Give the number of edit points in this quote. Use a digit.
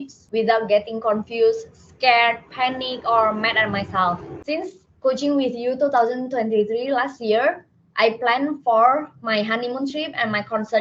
1